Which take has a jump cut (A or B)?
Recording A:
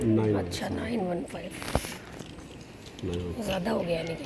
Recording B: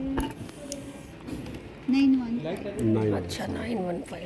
B